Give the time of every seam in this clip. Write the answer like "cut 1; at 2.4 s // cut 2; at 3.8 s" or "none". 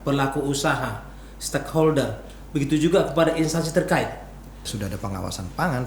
cut 1; at 4.7 s